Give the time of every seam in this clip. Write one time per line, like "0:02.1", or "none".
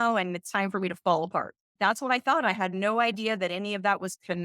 0:01.7